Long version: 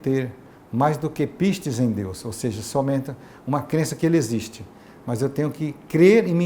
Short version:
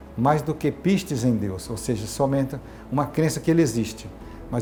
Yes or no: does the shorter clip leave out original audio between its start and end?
no